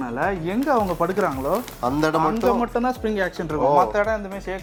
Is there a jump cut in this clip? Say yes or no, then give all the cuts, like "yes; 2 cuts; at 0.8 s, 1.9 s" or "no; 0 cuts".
no; 0 cuts